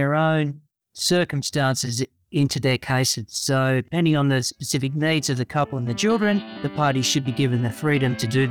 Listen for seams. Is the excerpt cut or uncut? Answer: cut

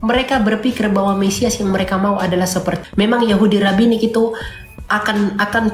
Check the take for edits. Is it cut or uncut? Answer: cut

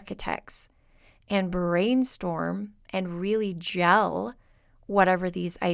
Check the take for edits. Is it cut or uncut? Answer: uncut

